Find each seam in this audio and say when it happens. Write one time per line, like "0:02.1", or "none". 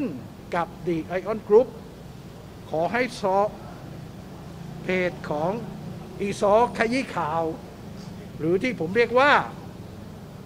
none